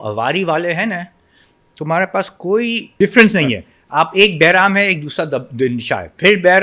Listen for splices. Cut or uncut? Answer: cut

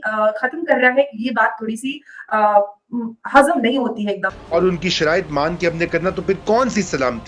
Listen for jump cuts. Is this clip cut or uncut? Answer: cut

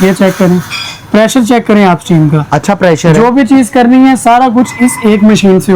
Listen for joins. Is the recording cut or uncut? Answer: uncut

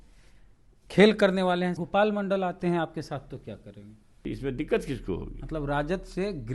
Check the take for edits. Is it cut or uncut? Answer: cut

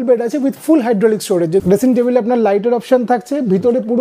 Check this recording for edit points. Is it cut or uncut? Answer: cut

